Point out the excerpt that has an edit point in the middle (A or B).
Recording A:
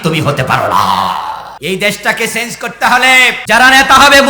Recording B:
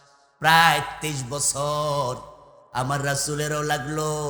A